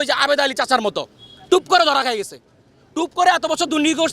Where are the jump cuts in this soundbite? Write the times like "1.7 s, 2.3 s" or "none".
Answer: none